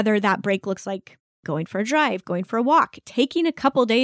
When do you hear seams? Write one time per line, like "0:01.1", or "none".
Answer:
0:01.4

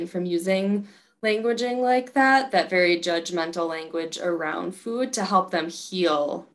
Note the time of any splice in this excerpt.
none

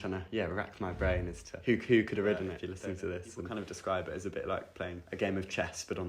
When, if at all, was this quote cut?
0:01.4
0:02.9
0:05.0

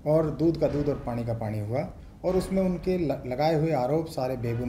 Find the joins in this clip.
0:02.0

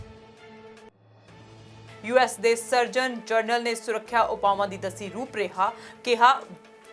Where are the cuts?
0:01.8

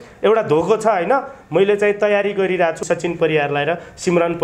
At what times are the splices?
0:02.8

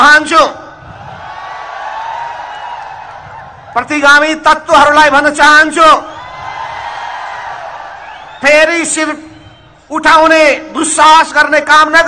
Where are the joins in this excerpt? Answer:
none

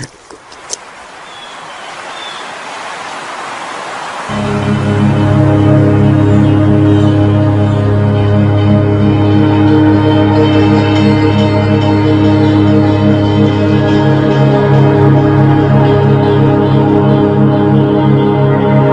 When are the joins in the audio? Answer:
none

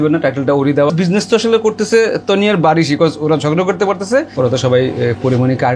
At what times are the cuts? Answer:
0:00.9
0:04.3

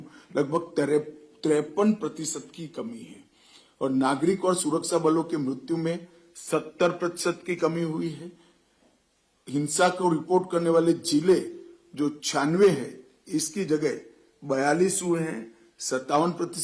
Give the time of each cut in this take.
none

